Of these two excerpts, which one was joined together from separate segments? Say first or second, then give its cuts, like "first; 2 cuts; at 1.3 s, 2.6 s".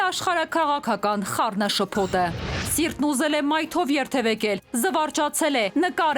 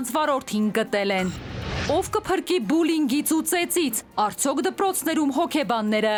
first; 1 cut; at 2.6 s